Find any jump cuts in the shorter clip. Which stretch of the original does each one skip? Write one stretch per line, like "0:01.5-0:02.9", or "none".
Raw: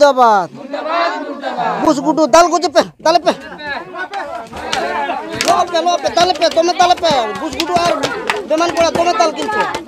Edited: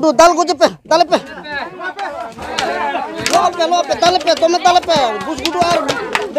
none